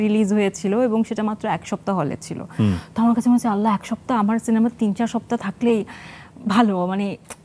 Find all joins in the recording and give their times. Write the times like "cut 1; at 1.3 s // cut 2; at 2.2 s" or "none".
none

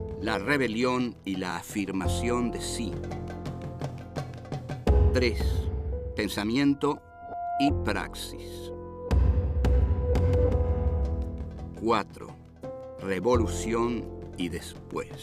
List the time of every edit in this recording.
cut 1; at 10.7 s

